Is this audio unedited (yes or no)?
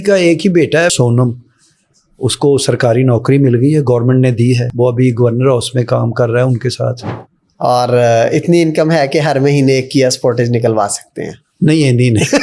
no